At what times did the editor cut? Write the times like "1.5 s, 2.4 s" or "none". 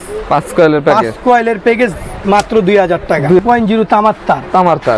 3.4 s